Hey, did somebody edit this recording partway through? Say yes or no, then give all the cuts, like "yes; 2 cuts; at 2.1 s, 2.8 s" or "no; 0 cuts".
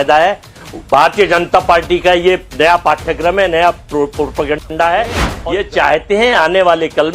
yes; 1 cut; at 5.3 s